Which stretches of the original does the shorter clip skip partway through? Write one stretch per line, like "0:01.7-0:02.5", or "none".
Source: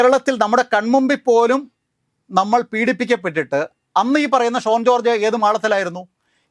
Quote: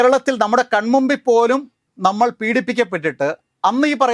0:01.8-0:02.1